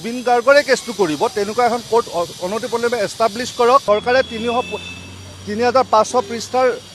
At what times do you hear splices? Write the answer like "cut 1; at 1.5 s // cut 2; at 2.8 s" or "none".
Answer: cut 1; at 3.8 s